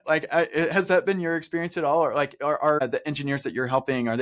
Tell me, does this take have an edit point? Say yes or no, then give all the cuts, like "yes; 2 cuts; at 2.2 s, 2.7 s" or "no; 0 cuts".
yes; 1 cut; at 2.8 s